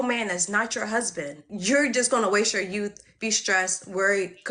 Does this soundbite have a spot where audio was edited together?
yes; 1 cut; at 1.5 s

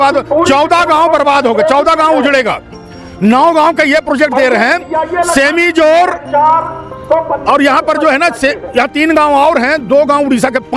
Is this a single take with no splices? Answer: yes; 0 cuts

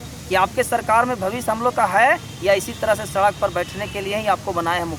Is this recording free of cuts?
yes; 0 cuts

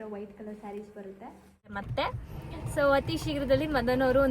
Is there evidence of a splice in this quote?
yes; 1 cut; at 1.7 s

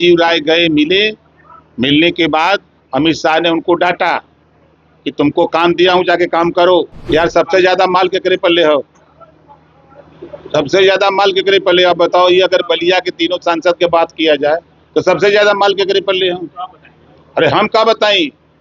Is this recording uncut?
no; 1 cut; at 7.0 s

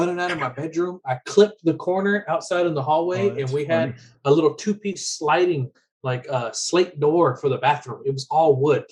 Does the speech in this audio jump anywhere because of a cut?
no; 0 cuts

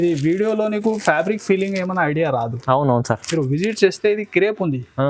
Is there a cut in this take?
no; 0 cuts

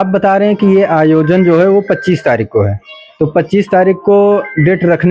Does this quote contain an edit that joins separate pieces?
no; 0 cuts

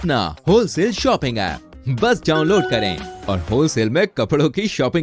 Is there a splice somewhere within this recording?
no; 0 cuts

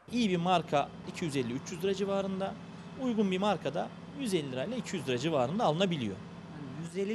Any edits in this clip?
yes; 1 cut; at 1.0 s

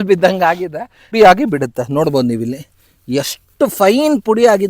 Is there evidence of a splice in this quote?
yes; 1 cut; at 1.1 s

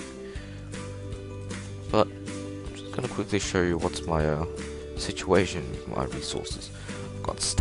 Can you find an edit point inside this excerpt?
yes; 1 cut; at 4.2 s

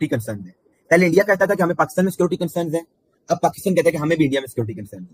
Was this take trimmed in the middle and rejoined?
no; 0 cuts

